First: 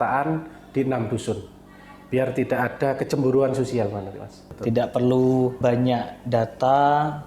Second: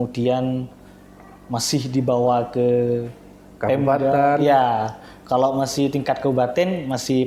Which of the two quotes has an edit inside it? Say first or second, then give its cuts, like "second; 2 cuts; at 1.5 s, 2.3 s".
first; 2 cuts; at 4.5 s, 5.6 s